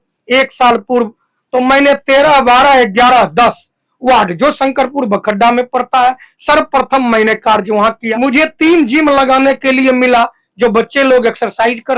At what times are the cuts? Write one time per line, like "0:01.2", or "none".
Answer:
0:08.1